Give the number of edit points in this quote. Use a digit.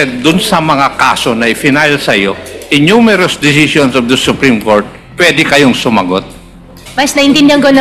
1